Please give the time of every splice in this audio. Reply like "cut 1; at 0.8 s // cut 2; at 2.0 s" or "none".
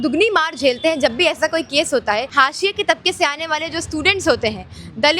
cut 1; at 2.3 s